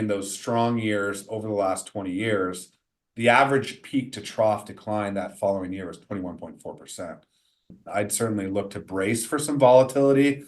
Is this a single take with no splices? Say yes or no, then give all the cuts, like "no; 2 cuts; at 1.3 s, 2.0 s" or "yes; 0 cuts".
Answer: no; 1 cut; at 7.7 s